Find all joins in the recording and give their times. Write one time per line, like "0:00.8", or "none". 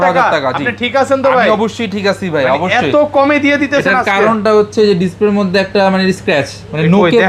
none